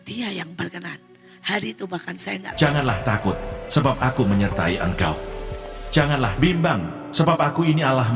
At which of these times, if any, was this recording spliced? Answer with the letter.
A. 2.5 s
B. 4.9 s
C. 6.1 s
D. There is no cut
A